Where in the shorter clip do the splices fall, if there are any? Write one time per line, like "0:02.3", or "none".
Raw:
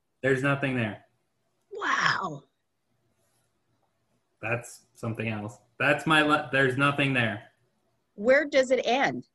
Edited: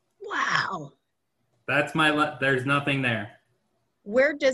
0:01.5